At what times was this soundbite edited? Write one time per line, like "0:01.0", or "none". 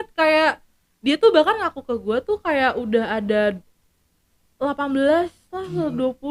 none